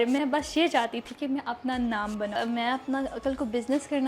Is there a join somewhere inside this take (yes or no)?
yes